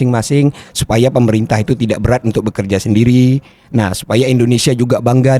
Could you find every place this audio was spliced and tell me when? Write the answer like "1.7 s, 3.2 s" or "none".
none